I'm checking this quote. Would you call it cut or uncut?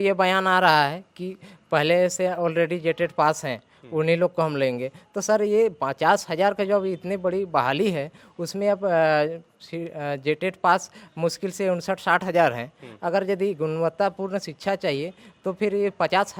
uncut